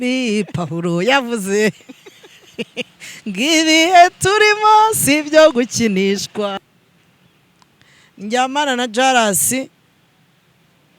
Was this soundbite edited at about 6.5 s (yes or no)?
yes